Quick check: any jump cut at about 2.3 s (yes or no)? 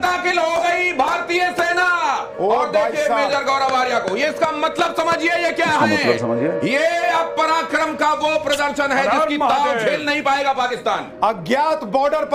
no